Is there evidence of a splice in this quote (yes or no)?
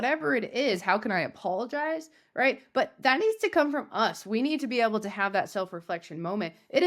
no